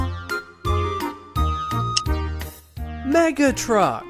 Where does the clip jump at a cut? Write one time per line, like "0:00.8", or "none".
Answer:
0:02.3